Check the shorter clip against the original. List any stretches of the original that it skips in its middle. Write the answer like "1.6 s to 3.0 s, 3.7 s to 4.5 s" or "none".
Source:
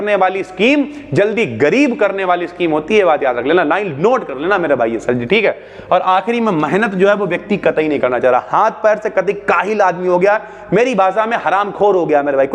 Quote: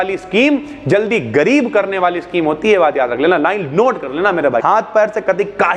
4.9 s to 8.5 s